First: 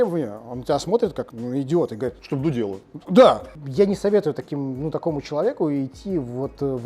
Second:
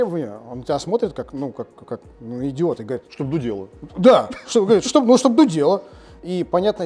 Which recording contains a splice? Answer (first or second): first